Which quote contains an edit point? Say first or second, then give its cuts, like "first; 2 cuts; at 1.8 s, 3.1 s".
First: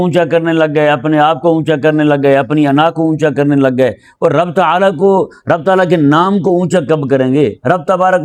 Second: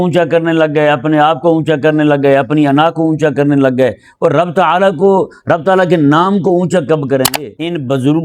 second; 1 cut; at 7.3 s